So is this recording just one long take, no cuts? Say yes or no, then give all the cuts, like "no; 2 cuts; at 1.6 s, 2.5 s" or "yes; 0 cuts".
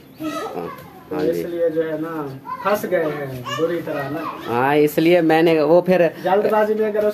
yes; 0 cuts